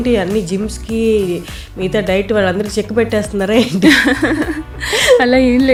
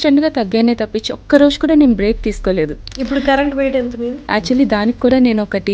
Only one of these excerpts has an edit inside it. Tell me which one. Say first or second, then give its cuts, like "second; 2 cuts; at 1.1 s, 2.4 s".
second; 2 cuts; at 2.9 s, 4.2 s